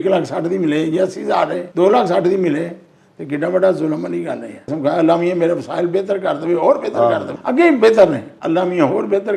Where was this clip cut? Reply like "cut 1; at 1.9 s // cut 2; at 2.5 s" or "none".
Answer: cut 1; at 1.6 s // cut 2; at 4.7 s // cut 3; at 7.3 s // cut 4; at 8.3 s